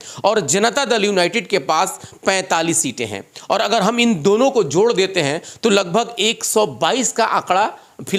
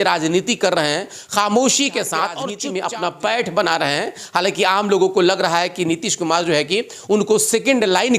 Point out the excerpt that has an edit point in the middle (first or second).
second